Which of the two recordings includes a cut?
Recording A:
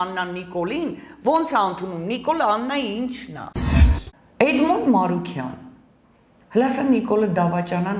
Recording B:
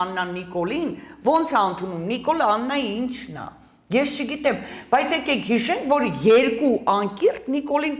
A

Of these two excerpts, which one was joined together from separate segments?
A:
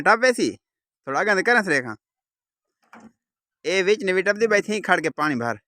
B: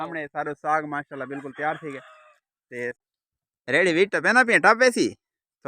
B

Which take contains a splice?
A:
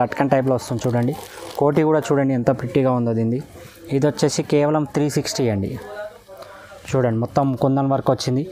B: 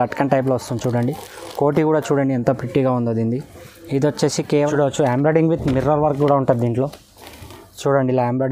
B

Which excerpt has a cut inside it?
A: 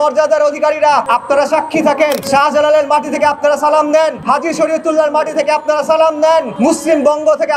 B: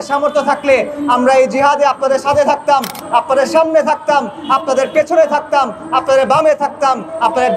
A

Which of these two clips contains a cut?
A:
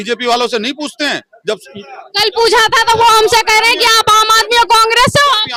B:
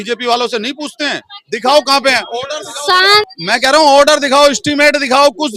B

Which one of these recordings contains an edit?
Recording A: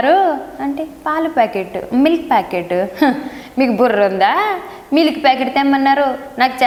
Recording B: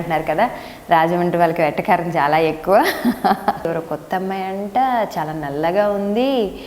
B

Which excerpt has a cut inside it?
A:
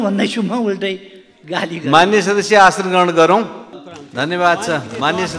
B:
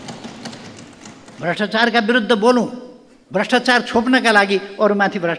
A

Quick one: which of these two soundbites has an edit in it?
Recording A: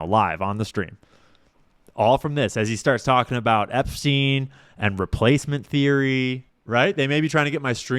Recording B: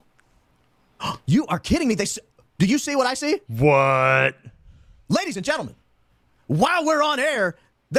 A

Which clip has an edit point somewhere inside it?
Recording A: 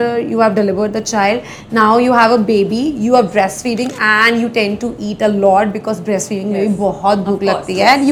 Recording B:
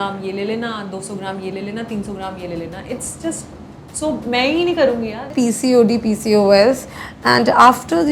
B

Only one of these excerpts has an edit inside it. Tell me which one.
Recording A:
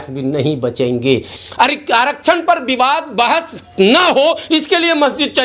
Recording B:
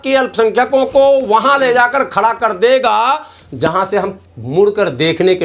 A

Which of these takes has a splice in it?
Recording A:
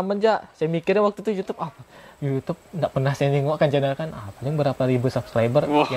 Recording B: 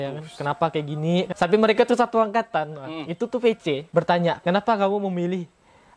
B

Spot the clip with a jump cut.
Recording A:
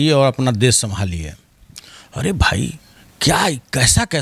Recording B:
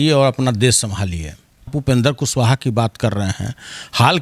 B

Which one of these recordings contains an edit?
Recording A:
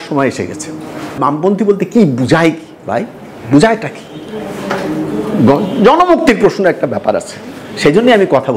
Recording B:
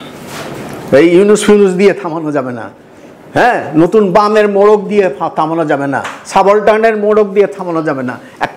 A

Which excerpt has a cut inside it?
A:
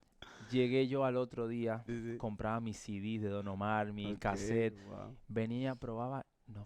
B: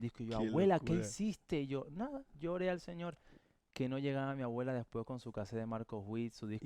A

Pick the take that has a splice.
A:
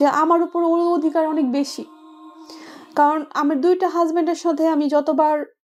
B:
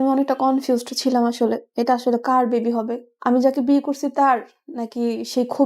B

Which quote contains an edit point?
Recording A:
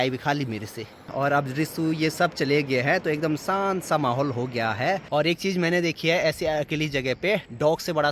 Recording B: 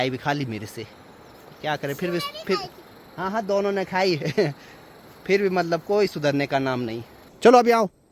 A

